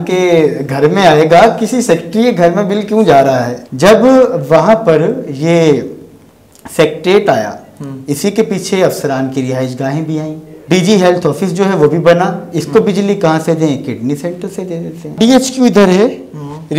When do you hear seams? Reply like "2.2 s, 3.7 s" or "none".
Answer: 3.6 s, 10.5 s, 15.2 s